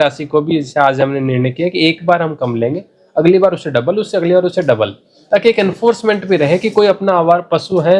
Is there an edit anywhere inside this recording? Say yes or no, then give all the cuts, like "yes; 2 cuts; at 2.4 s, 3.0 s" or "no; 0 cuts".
no; 0 cuts